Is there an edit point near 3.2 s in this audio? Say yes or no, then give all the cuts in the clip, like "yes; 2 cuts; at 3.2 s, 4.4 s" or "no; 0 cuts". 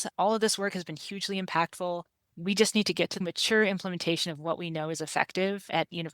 yes; 1 cut; at 3.2 s